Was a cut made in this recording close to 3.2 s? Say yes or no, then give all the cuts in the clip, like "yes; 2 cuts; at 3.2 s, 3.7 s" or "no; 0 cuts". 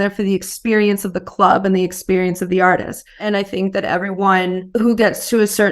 yes; 2 cuts; at 3.2 s, 4.6 s